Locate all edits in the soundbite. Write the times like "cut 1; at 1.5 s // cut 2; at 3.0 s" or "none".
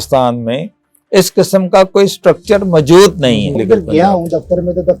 cut 1; at 3.6 s